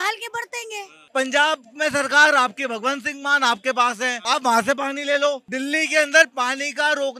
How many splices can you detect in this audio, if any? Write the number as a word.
three